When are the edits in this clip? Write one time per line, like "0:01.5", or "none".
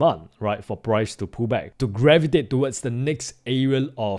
0:01.7